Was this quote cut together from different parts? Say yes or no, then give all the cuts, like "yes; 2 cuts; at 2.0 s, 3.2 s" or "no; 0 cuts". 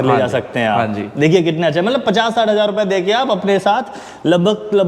no; 0 cuts